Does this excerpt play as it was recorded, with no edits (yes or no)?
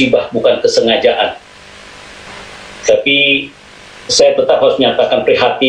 yes